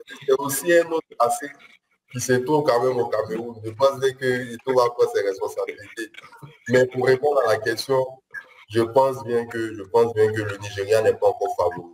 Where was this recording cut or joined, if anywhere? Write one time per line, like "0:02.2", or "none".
none